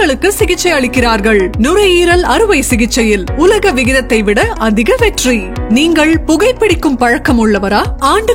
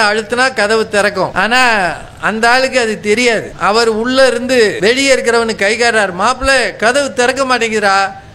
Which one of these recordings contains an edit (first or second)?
second